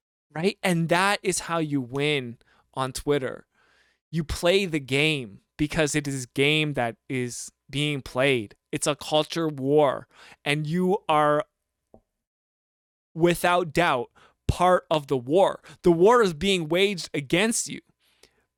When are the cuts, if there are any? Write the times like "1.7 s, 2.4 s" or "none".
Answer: none

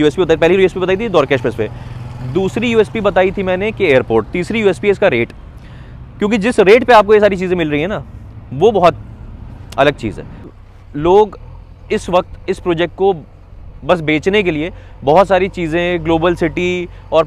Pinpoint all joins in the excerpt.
10.5 s

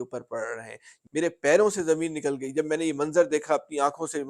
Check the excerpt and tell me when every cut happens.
1.0 s

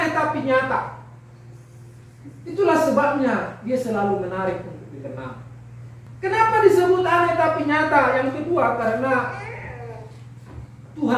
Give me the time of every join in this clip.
6.0 s

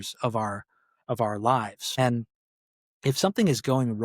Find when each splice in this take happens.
1.8 s

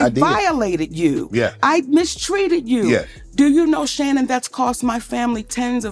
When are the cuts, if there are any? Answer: none

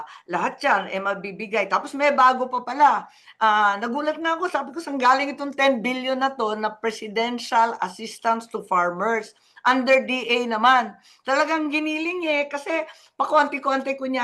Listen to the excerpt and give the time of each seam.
none

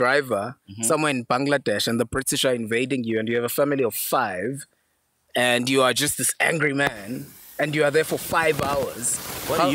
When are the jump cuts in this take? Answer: none

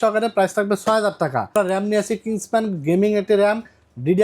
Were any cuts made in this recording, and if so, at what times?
1.5 s

